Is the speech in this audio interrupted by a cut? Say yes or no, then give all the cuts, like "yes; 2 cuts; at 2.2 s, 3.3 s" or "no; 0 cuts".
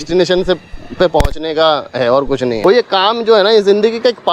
yes; 1 cut; at 2.6 s